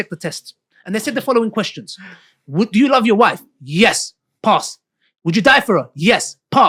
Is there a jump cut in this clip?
no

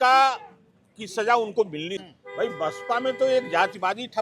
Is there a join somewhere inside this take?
yes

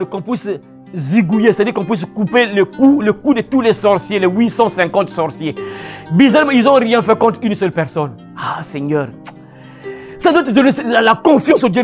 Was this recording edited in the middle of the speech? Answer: no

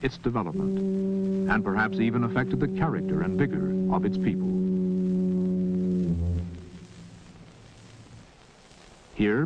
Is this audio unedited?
no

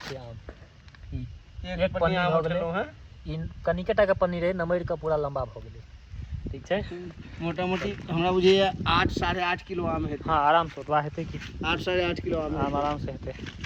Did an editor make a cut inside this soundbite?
no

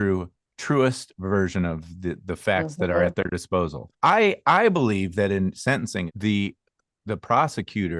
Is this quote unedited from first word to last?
no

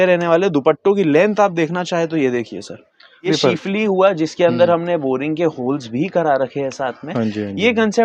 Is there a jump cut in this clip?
yes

